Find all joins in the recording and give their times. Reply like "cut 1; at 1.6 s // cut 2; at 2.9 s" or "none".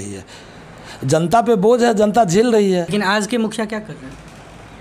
cut 1; at 2.9 s